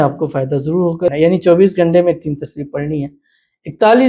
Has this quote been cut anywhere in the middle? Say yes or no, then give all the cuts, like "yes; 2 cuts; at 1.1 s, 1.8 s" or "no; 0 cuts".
yes; 1 cut; at 1.1 s